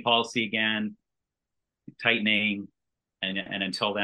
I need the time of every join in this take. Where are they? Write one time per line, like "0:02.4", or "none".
0:01.5